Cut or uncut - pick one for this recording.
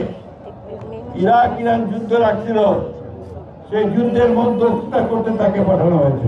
uncut